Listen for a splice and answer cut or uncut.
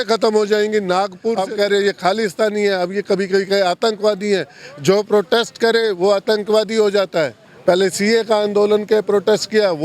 cut